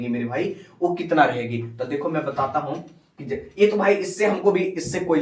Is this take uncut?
yes; 0 cuts

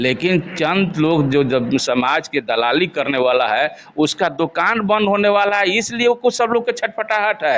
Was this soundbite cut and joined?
no; 0 cuts

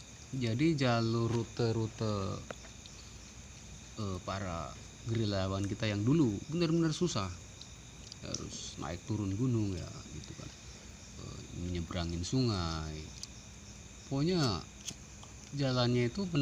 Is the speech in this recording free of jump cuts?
yes; 0 cuts

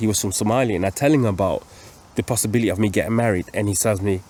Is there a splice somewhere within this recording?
no; 0 cuts

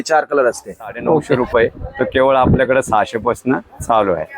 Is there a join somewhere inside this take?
yes; 1 cut; at 1.3 s

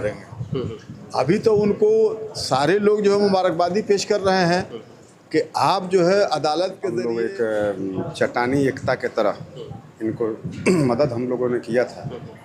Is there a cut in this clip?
yes; 1 cut; at 6.8 s

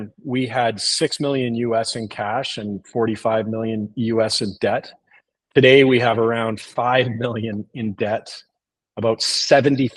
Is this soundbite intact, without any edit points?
yes; 0 cuts

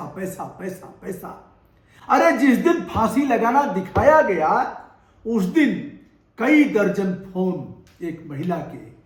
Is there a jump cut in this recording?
no; 0 cuts

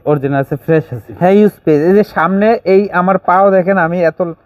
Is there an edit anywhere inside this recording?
yes; 1 cut; at 1.1 s

